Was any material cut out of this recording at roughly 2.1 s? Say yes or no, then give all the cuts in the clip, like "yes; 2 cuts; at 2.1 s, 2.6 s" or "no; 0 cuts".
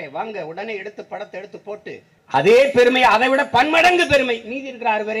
yes; 1 cut; at 2.1 s